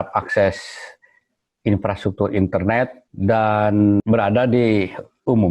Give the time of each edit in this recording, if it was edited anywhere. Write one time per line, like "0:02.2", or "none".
0:03.0
0:04.0